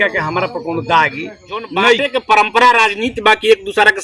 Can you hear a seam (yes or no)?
yes